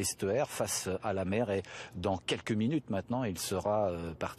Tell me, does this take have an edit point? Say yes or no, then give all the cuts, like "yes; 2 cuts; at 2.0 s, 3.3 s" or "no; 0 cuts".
yes; 1 cut; at 1.0 s